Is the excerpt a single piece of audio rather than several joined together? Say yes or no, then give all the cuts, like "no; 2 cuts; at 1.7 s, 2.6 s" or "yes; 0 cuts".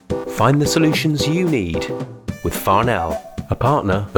yes; 0 cuts